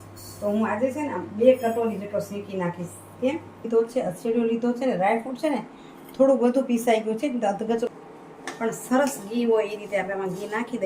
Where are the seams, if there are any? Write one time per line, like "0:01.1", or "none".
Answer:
0:03.6
0:07.9